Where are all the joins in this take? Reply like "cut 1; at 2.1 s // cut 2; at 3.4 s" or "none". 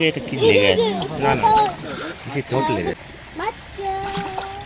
cut 1; at 2.9 s